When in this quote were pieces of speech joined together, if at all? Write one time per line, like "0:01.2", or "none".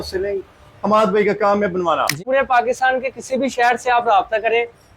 0:02.2

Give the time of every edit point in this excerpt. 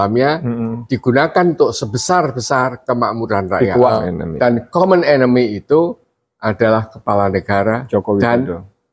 0:03.9

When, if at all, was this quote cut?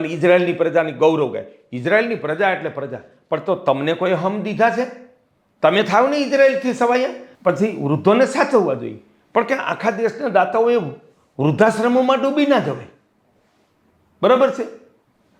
0:07.2

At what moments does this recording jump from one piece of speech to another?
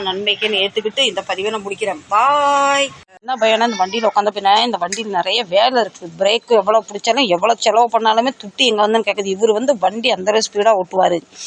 0:03.1

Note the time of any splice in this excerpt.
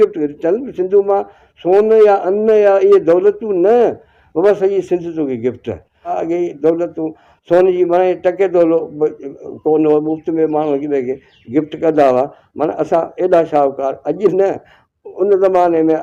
0:06.2

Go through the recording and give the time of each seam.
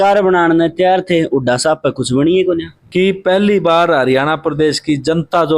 0:02.8

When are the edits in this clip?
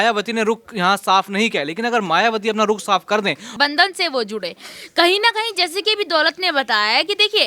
0:03.5

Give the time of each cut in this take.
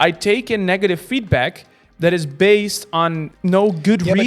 0:03.2

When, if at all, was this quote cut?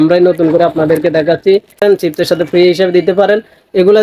0:01.8

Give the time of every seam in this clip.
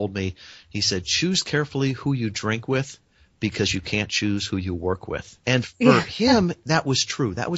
none

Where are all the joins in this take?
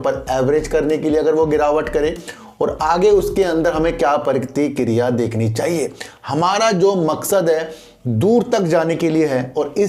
none

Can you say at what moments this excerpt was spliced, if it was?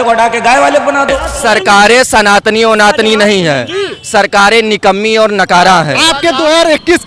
0:01.3
0:06.0

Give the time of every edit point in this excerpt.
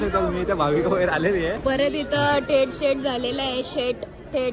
none

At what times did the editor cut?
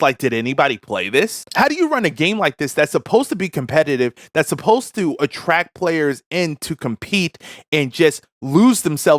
0:01.4

